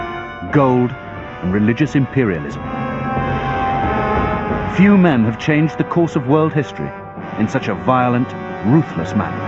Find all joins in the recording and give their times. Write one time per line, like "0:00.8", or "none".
0:06.5